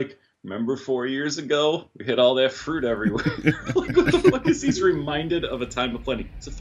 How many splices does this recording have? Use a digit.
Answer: 0